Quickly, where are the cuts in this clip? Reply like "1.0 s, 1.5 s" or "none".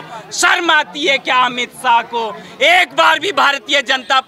none